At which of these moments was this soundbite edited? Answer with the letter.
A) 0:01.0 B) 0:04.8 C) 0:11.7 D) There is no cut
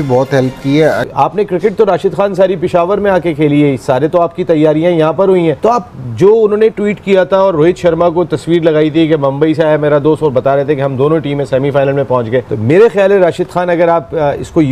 A